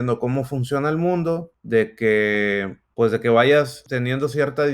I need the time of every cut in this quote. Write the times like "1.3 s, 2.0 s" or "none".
1.5 s, 2.8 s, 3.8 s

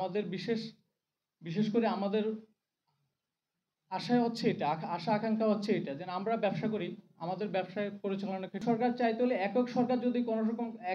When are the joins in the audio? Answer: 8.6 s

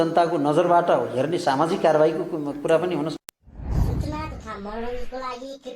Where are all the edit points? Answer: 3.2 s

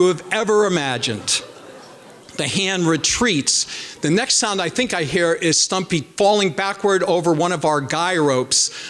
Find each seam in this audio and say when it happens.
6.1 s

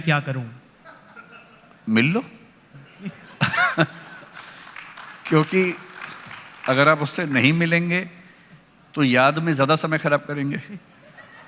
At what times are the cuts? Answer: none

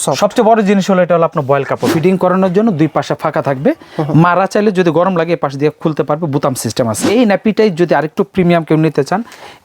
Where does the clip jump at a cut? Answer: 1.9 s, 7.0 s

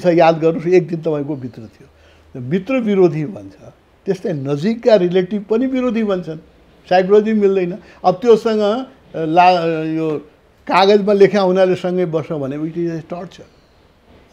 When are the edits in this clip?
none

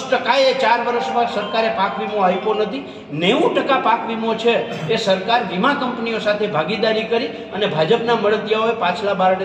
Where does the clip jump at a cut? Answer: none

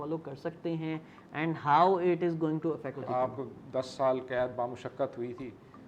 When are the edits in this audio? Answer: 3.0 s

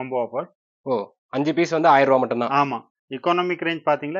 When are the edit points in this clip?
2.9 s

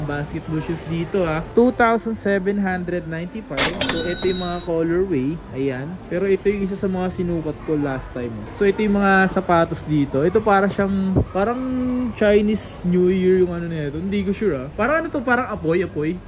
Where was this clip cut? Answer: none

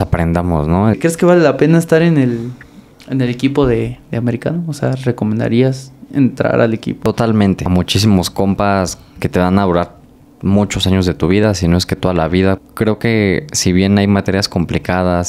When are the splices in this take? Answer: 1.0 s, 7.0 s, 7.7 s, 12.7 s

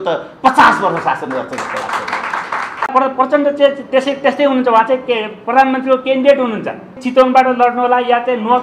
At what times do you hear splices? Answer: 2.9 s, 7.0 s

